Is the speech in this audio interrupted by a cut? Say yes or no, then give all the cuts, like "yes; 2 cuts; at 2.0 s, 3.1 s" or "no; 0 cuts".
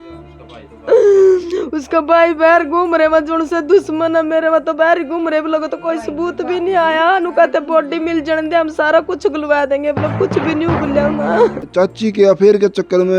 yes; 1 cut; at 11.6 s